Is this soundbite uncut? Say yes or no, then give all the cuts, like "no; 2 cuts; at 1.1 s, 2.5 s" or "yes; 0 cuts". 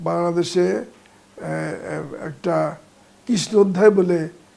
yes; 0 cuts